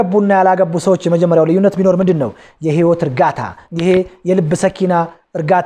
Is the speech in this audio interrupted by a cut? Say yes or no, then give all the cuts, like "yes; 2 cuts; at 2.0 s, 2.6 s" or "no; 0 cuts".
yes; 1 cut; at 3.6 s